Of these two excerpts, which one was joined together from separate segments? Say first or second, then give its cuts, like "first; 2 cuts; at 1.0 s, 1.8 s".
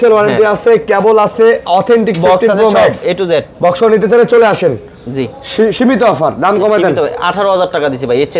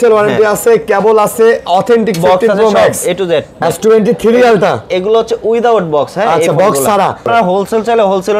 second; 2 cuts; at 3.6 s, 7.3 s